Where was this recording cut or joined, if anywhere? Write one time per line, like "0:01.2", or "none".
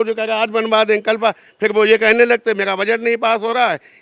none